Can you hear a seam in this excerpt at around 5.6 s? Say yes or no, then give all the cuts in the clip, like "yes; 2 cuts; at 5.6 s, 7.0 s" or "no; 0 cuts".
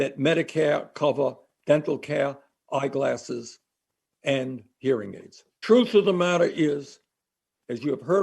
yes; 1 cut; at 5.6 s